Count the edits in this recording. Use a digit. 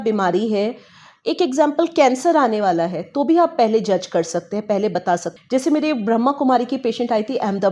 1